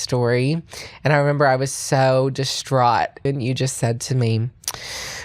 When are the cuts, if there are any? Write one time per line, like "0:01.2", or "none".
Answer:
0:03.2